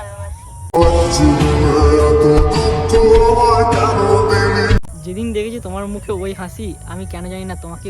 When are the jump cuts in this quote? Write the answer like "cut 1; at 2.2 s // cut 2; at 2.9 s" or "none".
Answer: cut 1; at 5.0 s